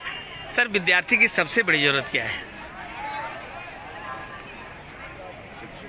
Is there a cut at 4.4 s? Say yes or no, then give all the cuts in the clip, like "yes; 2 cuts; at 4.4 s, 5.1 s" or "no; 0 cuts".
no; 0 cuts